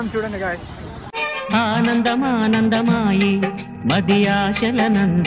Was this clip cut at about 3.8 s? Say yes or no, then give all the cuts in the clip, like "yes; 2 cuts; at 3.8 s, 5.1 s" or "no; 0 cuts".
no; 1 cut; at 1.1 s